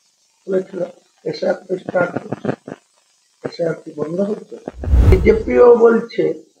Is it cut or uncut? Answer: cut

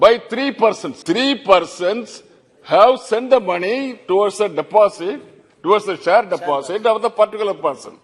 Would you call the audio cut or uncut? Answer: cut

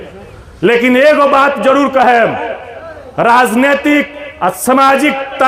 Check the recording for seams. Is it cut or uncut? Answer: uncut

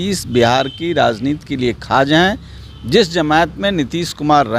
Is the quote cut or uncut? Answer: uncut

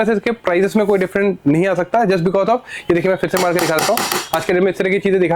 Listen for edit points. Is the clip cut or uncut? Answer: uncut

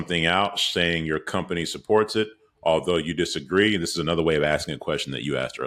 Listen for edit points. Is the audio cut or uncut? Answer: uncut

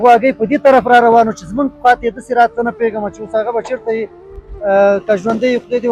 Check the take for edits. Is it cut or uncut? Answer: uncut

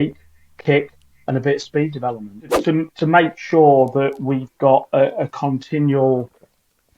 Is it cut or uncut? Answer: cut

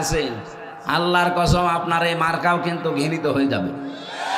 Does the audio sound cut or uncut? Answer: uncut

